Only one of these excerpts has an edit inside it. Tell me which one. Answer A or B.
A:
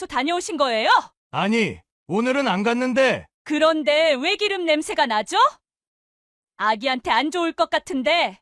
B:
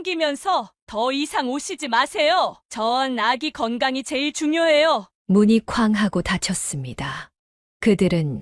A